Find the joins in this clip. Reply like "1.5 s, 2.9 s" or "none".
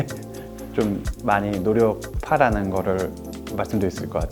none